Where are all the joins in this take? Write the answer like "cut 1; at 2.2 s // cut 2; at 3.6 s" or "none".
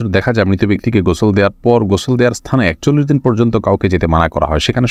none